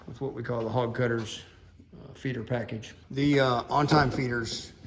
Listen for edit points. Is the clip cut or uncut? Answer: cut